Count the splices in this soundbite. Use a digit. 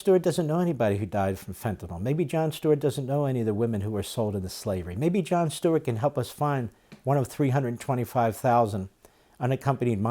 0